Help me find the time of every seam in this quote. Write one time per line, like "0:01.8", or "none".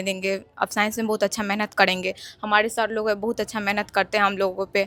none